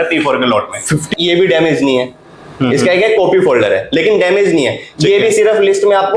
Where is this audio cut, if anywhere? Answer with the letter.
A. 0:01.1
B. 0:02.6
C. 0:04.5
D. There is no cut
A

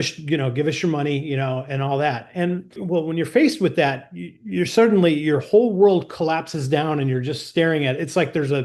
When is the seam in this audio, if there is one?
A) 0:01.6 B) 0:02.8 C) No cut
B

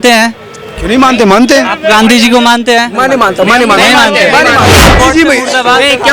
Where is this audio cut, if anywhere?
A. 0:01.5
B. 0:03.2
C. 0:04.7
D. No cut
C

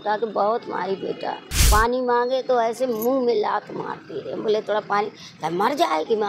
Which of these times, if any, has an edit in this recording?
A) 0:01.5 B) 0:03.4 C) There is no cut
A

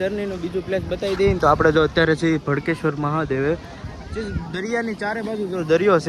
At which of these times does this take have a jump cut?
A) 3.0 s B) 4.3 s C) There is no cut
C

